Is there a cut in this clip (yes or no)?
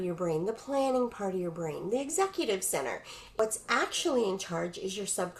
yes